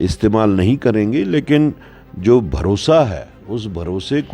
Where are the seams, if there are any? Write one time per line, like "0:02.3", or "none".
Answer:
none